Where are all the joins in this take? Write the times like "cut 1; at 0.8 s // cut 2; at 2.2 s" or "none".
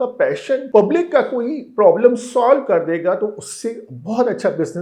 none